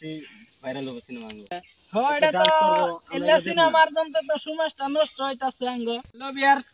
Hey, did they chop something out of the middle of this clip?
yes; 1 cut; at 1.5 s

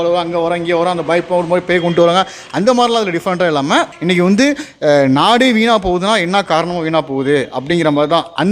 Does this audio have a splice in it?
yes; 1 cut; at 3.9 s

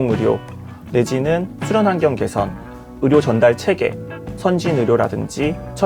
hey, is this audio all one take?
yes; 0 cuts

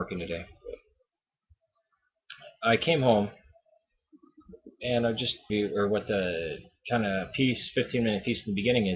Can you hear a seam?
no; 0 cuts

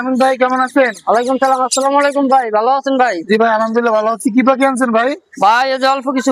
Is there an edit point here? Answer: no; 0 cuts

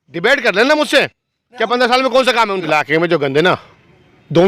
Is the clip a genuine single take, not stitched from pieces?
no; 1 cut; at 2.7 s

